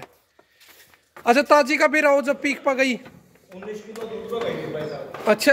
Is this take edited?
no; 0 cuts

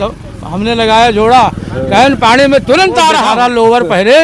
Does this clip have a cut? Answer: yes; 1 cut; at 3.1 s

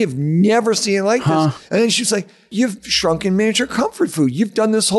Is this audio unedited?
no; 1 cut; at 2.5 s

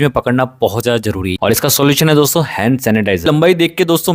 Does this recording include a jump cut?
yes; 2 cuts; at 1.3 s, 3.2 s

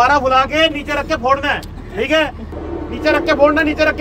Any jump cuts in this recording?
yes; 1 cut; at 2.5 s

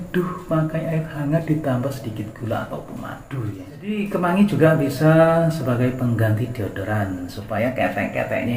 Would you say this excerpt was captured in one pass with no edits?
no; 1 cut; at 3.7 s

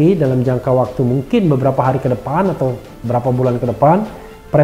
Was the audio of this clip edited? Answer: no; 0 cuts

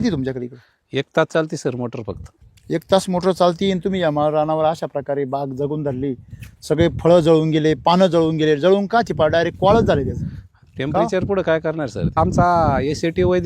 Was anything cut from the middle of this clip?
yes; 2 cuts; at 2.3 s, 12.2 s

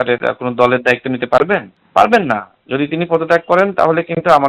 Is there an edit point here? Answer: no; 0 cuts

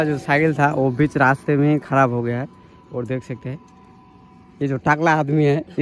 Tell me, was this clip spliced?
no; 0 cuts

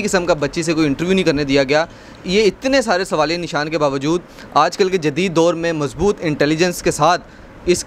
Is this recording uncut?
yes; 0 cuts

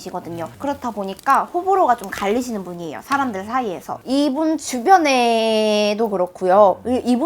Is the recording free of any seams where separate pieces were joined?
yes; 0 cuts

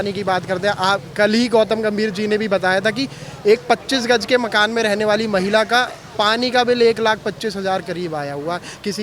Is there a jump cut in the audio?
no; 0 cuts

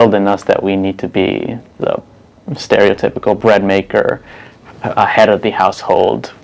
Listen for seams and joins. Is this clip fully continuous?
no; 1 cut; at 3.4 s

